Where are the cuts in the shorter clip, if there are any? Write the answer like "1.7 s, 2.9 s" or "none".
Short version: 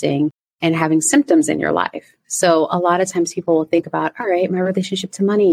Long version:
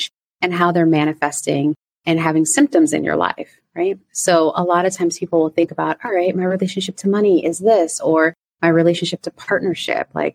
2.2 s